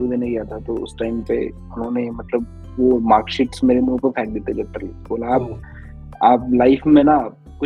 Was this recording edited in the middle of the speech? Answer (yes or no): no